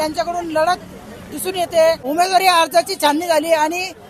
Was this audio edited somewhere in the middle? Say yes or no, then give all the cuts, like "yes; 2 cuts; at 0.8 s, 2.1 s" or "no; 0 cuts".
yes; 1 cut; at 2.0 s